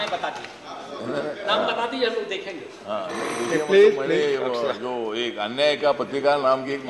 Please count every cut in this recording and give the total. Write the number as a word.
zero